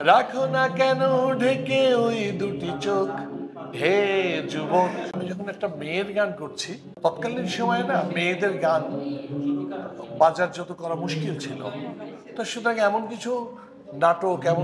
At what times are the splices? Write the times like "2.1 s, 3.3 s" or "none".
5.1 s, 7.0 s